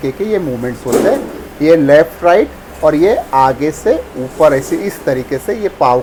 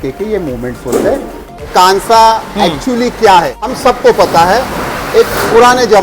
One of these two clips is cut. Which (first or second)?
second